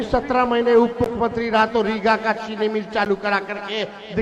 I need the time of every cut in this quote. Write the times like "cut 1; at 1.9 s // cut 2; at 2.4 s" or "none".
none